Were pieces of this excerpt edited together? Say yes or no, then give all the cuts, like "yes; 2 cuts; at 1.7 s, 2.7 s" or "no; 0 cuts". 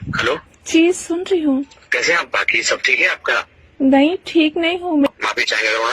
yes; 3 cuts; at 1.8 s, 3.6 s, 5.1 s